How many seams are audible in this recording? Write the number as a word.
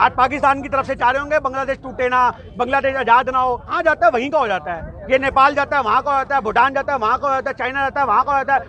one